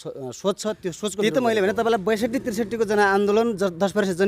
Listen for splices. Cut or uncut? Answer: cut